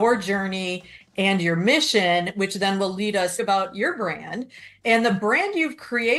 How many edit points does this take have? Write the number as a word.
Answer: one